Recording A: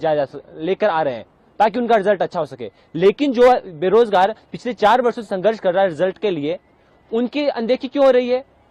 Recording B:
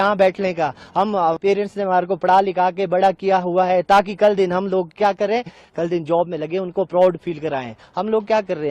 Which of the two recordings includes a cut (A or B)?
B